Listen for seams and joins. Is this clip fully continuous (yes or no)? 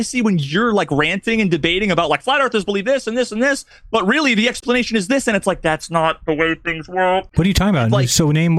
yes